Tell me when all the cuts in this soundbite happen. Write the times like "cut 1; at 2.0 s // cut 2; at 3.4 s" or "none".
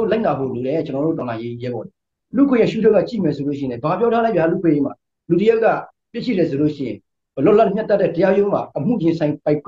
cut 1; at 2.2 s